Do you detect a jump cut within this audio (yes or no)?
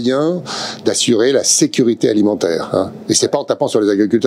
yes